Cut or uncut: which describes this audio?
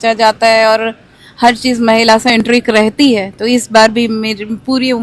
uncut